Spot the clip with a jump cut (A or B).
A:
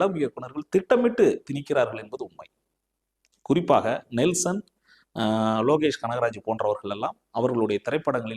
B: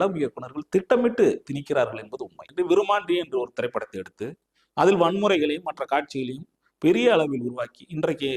B